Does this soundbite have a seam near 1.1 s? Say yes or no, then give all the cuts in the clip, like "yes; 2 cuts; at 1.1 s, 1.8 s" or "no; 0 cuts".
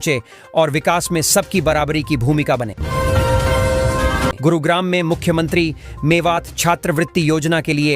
no; 2 cuts; at 2.8 s, 4.4 s